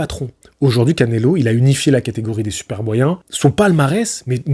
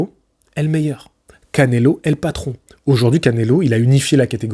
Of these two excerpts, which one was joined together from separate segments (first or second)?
first